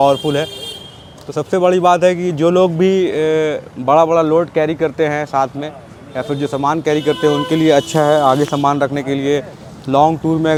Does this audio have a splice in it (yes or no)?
no